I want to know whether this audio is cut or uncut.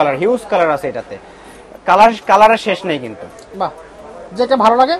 uncut